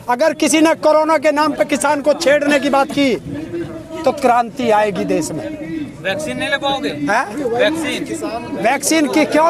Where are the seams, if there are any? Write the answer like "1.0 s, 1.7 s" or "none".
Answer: none